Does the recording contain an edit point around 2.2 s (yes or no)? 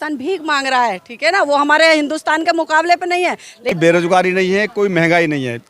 no